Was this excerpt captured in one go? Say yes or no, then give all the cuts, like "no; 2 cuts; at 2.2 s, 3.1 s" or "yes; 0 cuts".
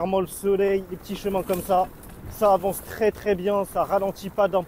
yes; 0 cuts